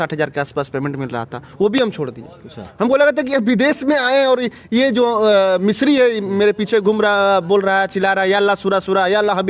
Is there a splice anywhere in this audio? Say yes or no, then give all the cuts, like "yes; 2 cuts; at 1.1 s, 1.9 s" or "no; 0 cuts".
no; 0 cuts